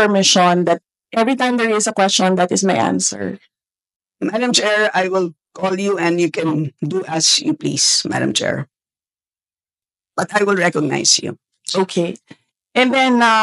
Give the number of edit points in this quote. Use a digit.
0